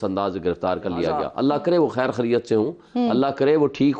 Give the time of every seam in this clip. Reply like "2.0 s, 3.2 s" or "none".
1.2 s